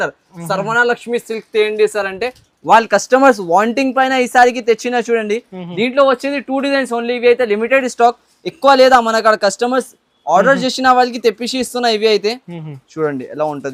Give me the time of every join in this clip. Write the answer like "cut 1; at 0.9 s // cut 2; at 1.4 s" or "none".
none